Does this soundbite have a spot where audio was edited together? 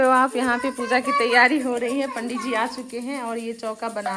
no; 0 cuts

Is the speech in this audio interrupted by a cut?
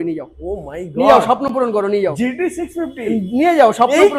no; 0 cuts

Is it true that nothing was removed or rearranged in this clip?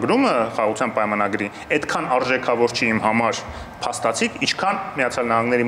yes; 0 cuts

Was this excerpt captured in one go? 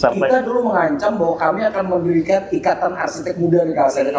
yes; 0 cuts

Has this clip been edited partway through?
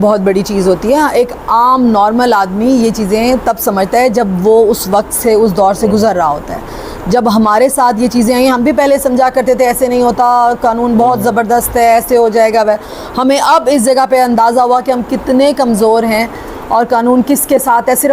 no; 0 cuts

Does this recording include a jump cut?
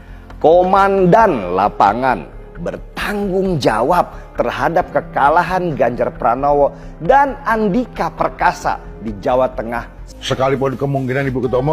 yes; 1 cut; at 10.0 s

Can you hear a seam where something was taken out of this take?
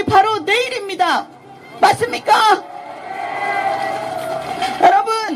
no; 0 cuts

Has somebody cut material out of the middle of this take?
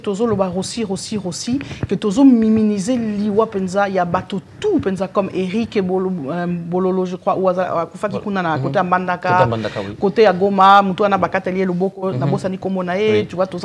no; 0 cuts

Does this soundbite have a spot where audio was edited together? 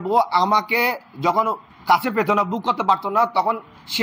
yes; 1 cut; at 1.7 s

